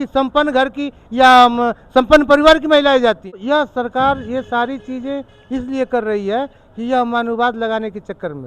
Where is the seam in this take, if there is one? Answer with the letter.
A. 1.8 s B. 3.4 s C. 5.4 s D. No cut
B